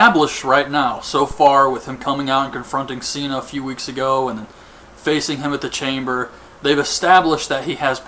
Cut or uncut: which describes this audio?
uncut